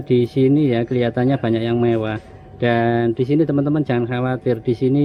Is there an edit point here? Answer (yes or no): no